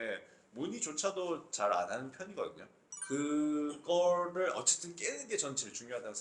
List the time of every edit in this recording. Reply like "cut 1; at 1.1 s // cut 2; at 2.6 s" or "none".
none